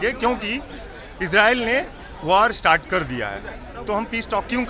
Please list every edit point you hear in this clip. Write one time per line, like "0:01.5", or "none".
none